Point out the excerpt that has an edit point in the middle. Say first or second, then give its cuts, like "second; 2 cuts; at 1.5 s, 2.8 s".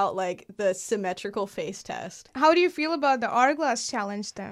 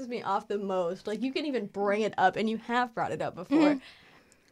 first; 1 cut; at 2.3 s